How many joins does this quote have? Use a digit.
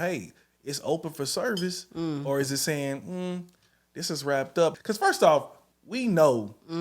1